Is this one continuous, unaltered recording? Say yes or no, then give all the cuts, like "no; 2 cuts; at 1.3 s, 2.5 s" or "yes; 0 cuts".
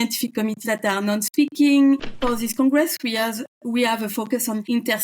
no; 1 cut; at 2.2 s